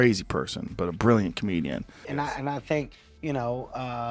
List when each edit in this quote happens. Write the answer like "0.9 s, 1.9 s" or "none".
2.1 s